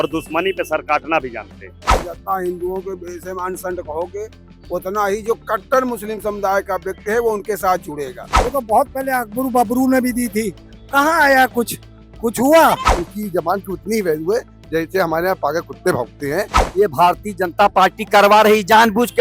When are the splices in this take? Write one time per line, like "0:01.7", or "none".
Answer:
0:02.0
0:08.3
0:13.0
0:16.6